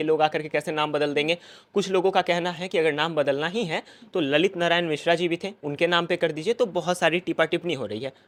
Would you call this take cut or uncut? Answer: uncut